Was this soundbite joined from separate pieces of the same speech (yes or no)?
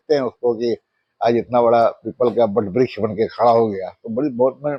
no